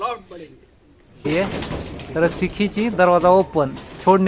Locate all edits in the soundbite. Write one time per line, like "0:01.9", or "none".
0:01.2